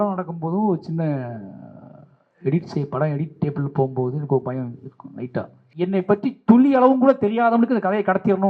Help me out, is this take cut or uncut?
cut